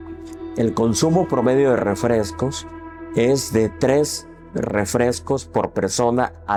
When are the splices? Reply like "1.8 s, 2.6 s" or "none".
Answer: none